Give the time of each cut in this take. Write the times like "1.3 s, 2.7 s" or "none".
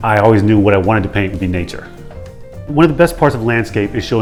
none